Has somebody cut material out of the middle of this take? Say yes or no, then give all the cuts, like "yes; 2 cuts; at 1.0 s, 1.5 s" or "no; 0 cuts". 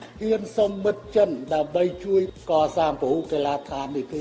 no; 0 cuts